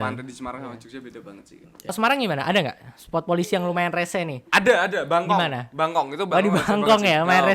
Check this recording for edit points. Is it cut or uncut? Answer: cut